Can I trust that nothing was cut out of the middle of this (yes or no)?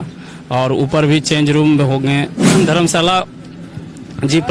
no